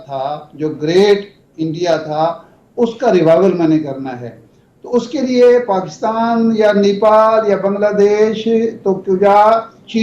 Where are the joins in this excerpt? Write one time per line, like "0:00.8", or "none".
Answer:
none

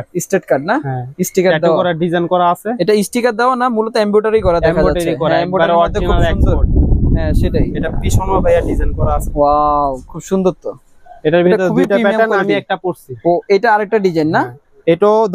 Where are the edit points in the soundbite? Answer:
none

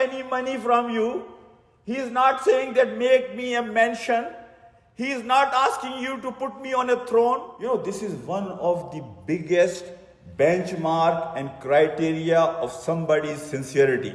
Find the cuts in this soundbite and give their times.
0:07.5

